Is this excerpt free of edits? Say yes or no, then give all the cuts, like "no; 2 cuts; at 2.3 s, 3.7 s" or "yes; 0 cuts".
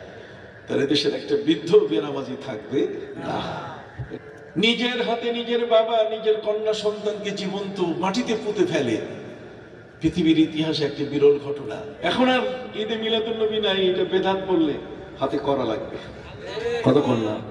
no; 2 cuts; at 4.1 s, 11.9 s